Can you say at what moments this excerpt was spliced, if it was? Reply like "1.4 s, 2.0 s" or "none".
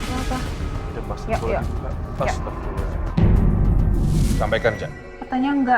4.1 s